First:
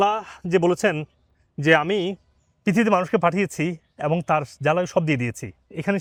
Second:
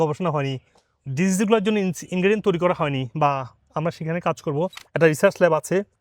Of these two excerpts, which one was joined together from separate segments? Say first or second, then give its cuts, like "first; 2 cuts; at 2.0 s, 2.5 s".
second; 1 cut; at 4.8 s